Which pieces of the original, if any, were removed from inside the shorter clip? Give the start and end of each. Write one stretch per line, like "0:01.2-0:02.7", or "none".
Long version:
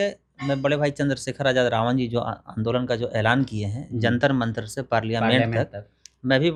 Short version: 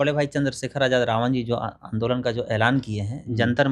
none